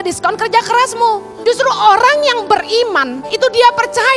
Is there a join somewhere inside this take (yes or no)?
yes